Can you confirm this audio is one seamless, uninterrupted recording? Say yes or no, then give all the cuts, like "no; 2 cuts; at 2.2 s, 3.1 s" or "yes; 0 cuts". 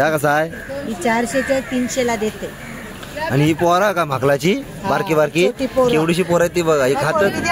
yes; 0 cuts